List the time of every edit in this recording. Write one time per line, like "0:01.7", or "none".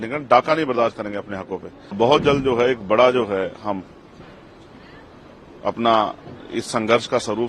0:02.0